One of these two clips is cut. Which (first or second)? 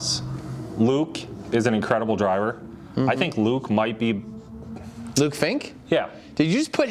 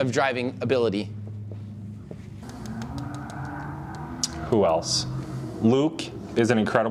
second